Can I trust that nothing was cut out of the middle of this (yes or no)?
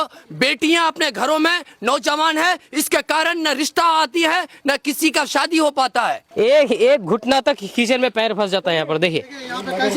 no